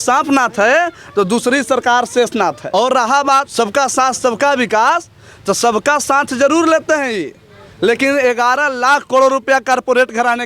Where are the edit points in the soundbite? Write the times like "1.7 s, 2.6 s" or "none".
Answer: 2.6 s, 3.5 s